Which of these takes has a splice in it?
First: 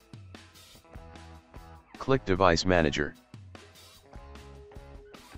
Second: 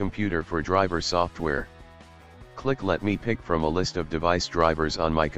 first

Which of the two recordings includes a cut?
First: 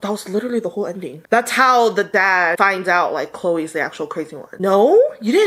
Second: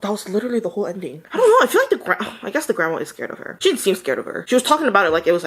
second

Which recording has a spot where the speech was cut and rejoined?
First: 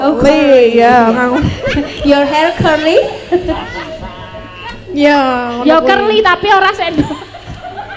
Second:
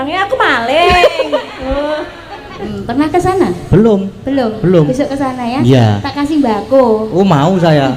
second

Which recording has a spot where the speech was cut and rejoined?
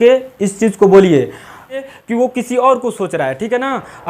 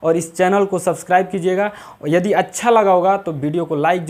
first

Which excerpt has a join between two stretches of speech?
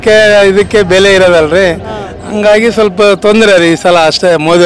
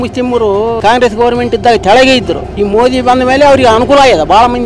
second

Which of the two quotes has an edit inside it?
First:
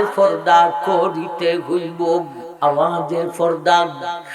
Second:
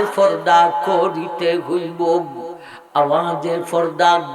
first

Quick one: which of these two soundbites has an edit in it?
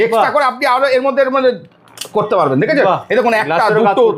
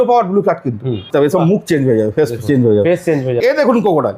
second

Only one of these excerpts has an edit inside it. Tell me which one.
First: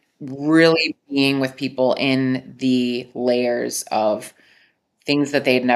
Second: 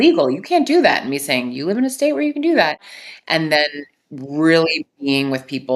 second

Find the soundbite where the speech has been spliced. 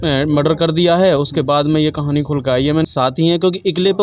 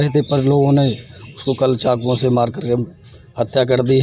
first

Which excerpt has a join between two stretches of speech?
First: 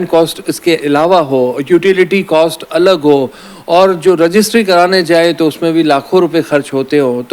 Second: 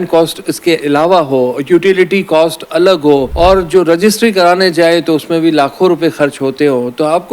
second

